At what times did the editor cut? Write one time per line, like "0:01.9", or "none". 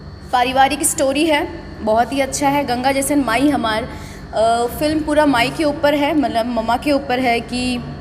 none